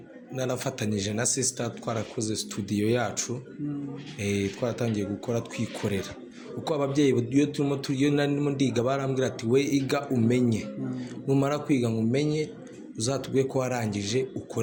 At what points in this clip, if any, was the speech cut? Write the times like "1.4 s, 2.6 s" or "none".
none